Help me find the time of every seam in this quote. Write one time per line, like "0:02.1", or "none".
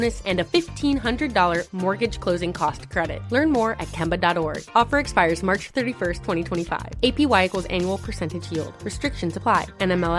none

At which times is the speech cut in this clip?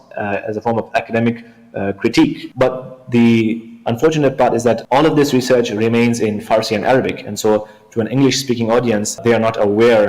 0:02.4
0:04.8
0:09.2

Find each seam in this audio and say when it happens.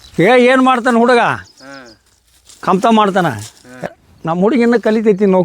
0:03.9

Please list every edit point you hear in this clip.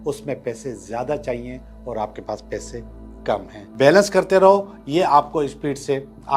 0:03.6

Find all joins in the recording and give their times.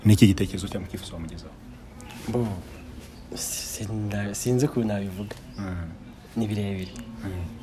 none

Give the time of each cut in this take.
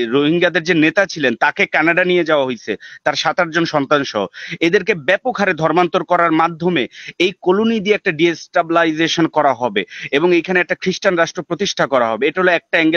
none

